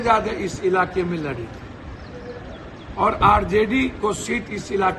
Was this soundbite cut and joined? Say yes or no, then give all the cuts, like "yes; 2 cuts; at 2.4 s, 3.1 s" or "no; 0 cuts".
no; 0 cuts